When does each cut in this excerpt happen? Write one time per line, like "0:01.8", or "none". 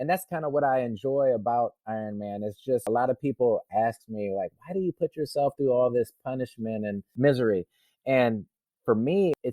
0:02.9
0:07.1